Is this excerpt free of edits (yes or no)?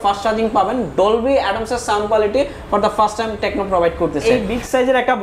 no